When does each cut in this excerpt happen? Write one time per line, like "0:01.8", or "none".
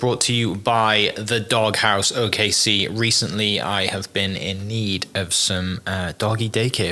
none